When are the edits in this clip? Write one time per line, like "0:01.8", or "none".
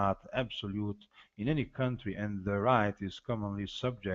0:02.8